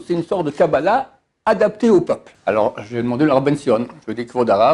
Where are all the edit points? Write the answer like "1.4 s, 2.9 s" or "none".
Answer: 2.3 s